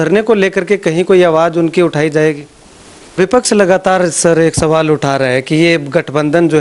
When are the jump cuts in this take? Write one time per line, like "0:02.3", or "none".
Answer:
0:03.1